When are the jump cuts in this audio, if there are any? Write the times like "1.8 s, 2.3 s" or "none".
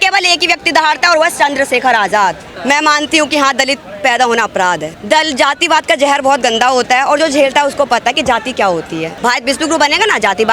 2.5 s, 4.9 s, 9.1 s